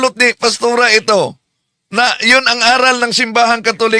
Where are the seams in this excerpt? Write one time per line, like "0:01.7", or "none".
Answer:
none